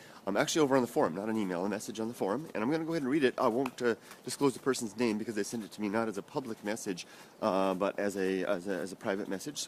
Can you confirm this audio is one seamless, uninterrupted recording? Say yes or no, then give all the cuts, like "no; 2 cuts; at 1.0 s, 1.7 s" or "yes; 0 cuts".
yes; 0 cuts